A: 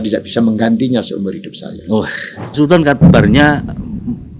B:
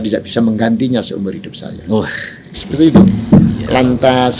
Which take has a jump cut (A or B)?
A